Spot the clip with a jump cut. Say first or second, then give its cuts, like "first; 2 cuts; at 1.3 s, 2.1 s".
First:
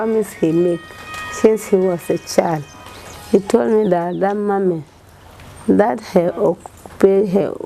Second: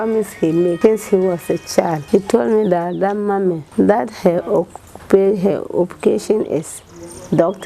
second; 3 cuts; at 0.8 s, 2.0 s, 3.6 s